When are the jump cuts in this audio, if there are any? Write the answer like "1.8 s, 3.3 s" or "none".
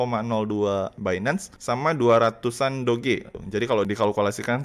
1.1 s, 3.4 s